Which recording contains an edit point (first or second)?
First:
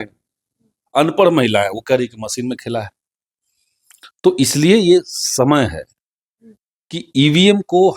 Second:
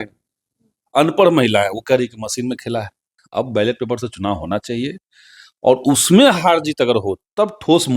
second